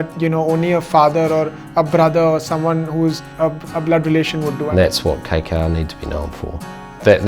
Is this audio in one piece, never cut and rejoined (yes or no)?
no